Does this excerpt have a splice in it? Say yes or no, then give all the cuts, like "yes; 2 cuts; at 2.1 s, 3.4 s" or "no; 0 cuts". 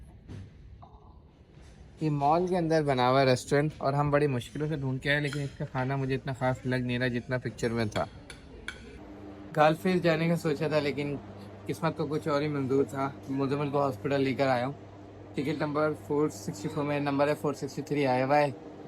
yes; 1 cut; at 9.4 s